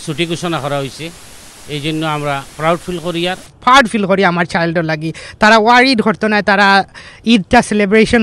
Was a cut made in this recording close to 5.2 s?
no; 1 cut; at 3.5 s

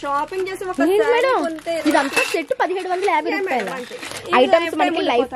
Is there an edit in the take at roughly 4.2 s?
yes; 1 cut; at 4.2 s

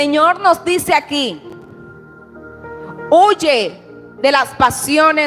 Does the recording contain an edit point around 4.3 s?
no; 0 cuts

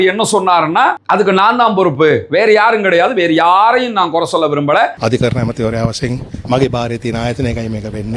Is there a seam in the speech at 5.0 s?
yes; 1 cut; at 5.0 s

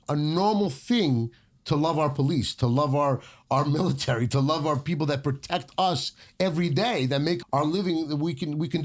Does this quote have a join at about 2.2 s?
no; 1 cut; at 7.4 s

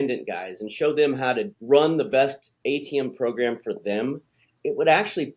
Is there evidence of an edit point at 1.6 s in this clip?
yes; 2 cuts; at 1.6 s, 2.5 s

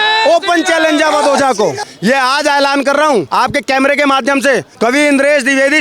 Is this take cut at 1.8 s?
yes; 3 cuts; at 1.8 s, 3.3 s, 4.7 s

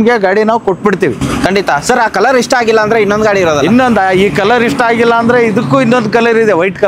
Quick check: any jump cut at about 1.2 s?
no; 0 cuts

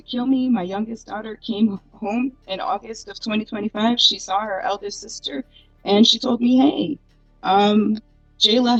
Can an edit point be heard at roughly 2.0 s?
no; 0 cuts

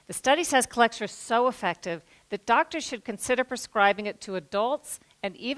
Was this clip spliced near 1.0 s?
yes; 1 cut; at 1.0 s

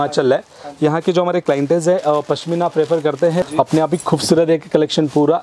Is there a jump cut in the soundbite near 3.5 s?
yes; 1 cut; at 3.5 s

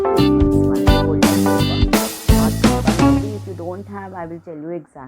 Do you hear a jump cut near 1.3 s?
no; 1 cut; at 3.4 s

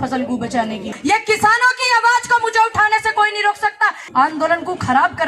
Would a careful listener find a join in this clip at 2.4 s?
no; 2 cuts; at 0.9 s, 4.0 s

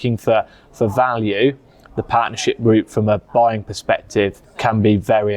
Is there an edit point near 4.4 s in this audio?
yes; 1 cut; at 4.4 s

